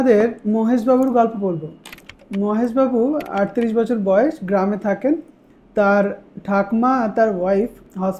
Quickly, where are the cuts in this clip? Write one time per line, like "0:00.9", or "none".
none